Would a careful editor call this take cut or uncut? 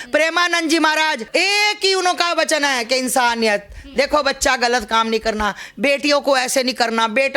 cut